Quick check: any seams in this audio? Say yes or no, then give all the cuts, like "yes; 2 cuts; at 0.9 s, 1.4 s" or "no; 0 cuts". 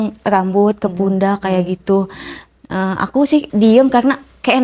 yes; 1 cut; at 3.5 s